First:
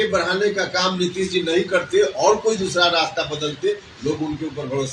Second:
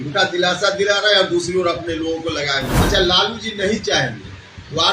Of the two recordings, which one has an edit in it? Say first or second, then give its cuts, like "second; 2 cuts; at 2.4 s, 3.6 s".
second; 1 cut; at 2.7 s